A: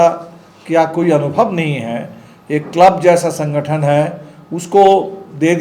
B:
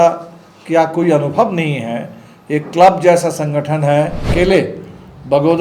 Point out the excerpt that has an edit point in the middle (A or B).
B